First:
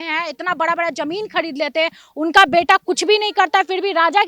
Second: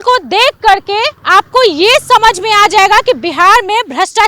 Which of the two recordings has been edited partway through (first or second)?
second